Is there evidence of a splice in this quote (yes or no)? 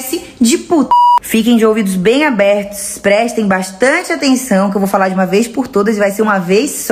yes